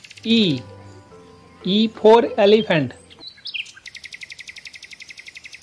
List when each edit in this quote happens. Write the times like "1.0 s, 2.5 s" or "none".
none